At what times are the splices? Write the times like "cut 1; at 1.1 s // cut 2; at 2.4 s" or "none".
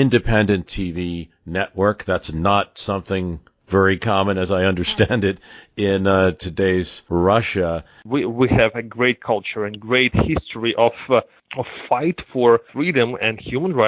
cut 1; at 7.0 s // cut 2; at 8.0 s